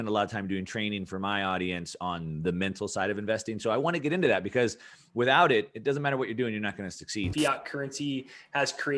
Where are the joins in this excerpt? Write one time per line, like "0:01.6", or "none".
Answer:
0:07.3